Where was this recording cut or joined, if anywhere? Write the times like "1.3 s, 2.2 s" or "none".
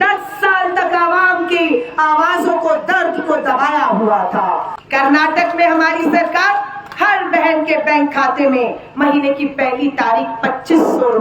4.8 s